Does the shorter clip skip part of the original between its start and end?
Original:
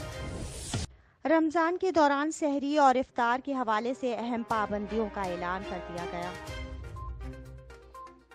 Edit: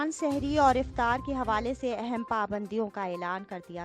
no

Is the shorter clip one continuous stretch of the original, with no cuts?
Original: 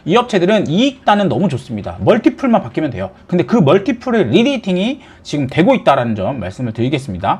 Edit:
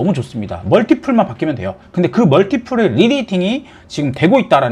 yes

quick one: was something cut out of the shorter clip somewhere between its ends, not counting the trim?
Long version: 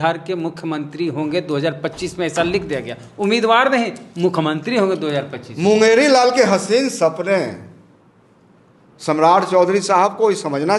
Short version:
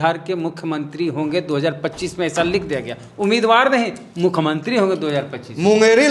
no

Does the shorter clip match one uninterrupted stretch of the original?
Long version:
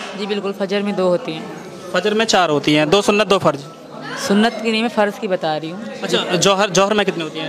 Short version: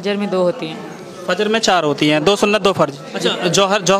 no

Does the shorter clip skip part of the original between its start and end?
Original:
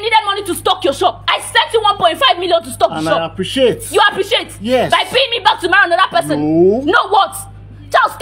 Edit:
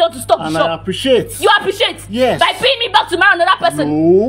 no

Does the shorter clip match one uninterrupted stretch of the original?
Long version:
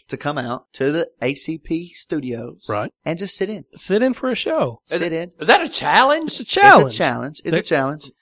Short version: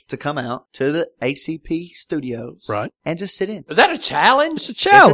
no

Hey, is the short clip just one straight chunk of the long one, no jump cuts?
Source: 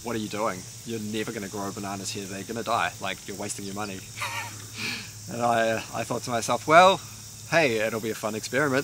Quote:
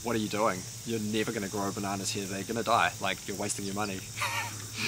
yes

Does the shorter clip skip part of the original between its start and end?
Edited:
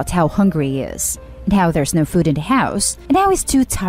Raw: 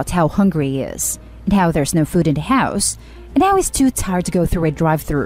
yes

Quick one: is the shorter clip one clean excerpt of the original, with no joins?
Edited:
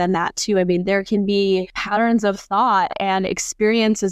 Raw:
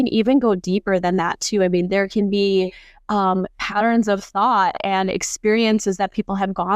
no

